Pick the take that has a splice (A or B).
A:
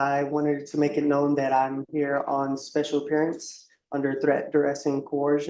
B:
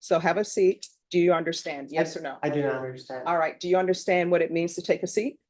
B